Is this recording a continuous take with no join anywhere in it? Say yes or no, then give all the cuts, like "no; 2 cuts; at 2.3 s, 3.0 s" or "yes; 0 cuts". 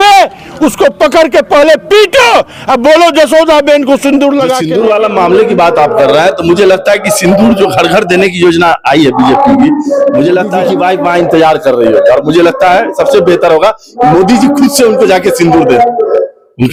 yes; 0 cuts